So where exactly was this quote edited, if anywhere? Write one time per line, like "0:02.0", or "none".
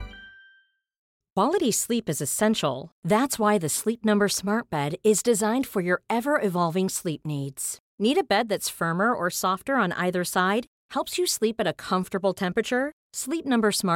0:01.0